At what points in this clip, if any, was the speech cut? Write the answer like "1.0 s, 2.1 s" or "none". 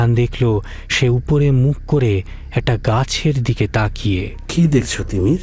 4.4 s